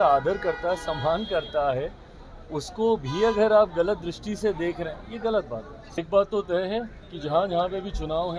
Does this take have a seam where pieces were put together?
yes; 1 cut; at 6.0 s

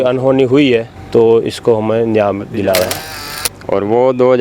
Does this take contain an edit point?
yes; 2 cuts; at 1.0 s, 3.1 s

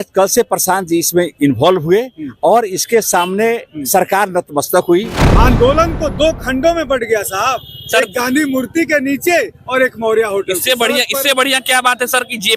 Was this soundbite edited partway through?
yes; 1 cut; at 5.2 s

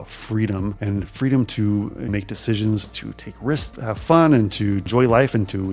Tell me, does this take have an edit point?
yes; 4 cuts; at 0.8 s, 2.1 s, 3.7 s, 4.9 s

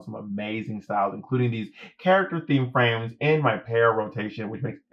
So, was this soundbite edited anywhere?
no; 0 cuts

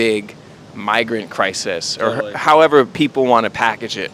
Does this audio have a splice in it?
yes; 1 cut; at 2.9 s

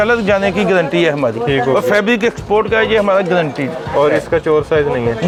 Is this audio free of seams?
yes; 0 cuts

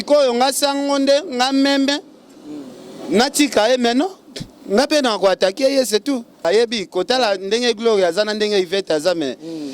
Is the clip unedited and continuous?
no; 1 cut; at 6.4 s

